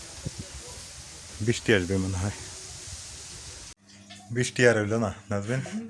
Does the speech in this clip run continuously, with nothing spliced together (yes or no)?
no